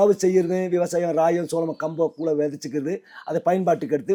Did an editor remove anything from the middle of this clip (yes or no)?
no